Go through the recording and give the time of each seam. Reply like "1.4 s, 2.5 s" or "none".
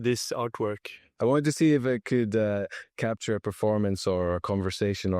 1.0 s